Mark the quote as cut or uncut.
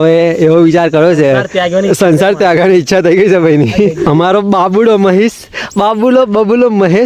cut